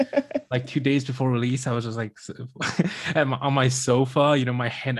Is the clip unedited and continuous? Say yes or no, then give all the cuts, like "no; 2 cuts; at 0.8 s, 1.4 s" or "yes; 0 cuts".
yes; 0 cuts